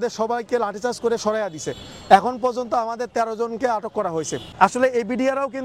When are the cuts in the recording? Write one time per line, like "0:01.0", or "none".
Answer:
0:04.4